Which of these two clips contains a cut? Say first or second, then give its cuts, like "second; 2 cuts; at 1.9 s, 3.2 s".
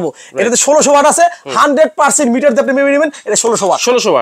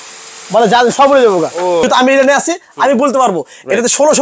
second; 1 cut; at 1.8 s